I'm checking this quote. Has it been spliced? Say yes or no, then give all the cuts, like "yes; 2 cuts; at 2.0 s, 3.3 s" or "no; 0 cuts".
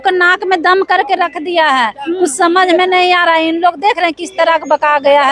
no; 0 cuts